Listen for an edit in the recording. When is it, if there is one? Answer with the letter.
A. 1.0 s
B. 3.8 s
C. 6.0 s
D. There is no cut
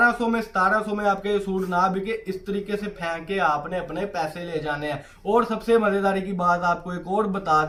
D